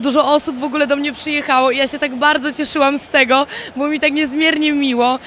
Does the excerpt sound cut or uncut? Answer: uncut